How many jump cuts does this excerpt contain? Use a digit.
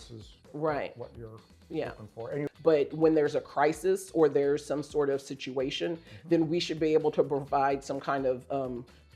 1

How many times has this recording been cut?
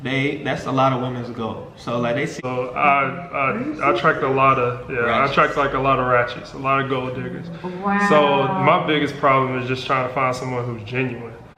1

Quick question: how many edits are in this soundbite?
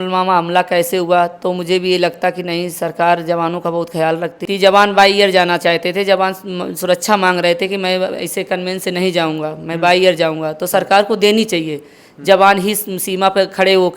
1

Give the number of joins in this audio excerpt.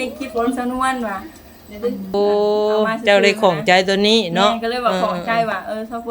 1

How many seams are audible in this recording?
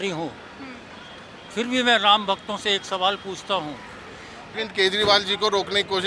1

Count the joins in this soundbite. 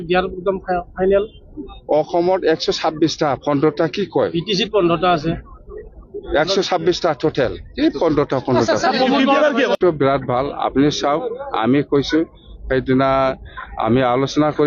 1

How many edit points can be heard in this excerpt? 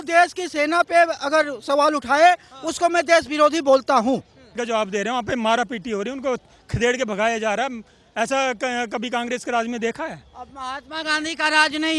1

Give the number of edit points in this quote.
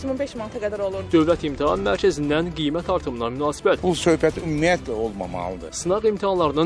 3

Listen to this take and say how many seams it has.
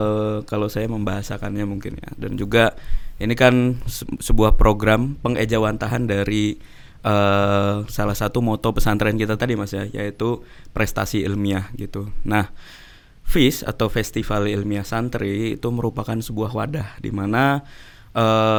0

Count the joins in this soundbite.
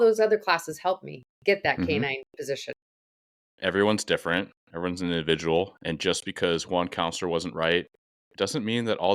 1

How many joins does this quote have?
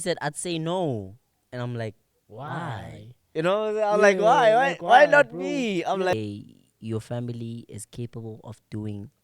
1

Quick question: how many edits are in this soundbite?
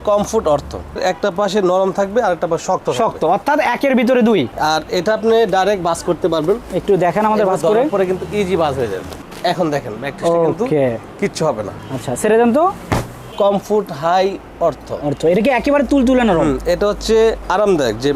3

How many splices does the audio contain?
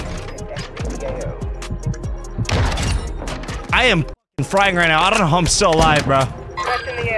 1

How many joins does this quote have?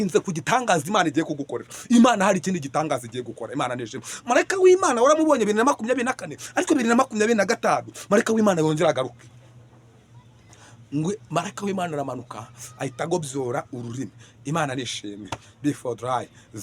0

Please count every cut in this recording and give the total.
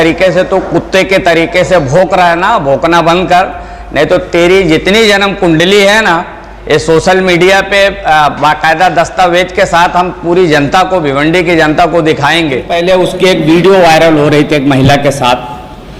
1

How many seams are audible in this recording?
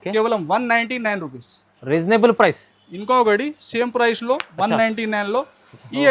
0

